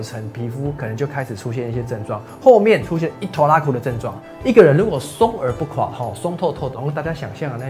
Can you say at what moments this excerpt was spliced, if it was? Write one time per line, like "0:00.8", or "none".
0:04.2
0:06.8